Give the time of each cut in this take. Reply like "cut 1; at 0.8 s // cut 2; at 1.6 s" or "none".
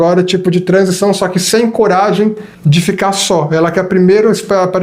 cut 1; at 2.5 s

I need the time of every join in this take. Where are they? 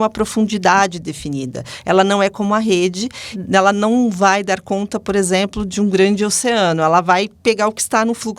cut 1; at 3.3 s

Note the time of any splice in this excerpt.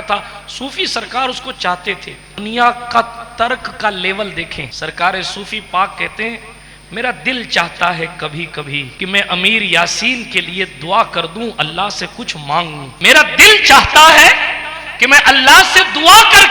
cut 1; at 2.4 s // cut 2; at 4.6 s // cut 3; at 8.9 s // cut 4; at 12.9 s

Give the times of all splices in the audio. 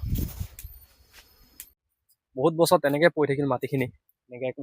cut 1; at 1.7 s

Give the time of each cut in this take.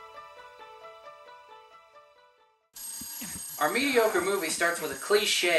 cut 1; at 2.5 s

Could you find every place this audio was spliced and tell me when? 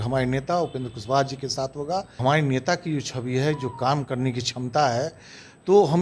cut 1; at 2.1 s

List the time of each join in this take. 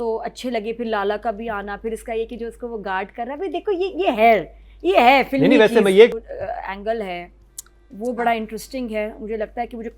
cut 1; at 6.1 s

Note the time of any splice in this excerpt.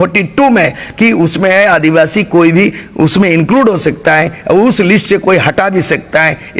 none

